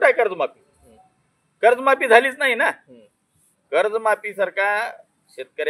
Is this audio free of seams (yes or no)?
yes